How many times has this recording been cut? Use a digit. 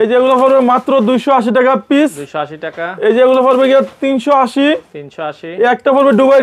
0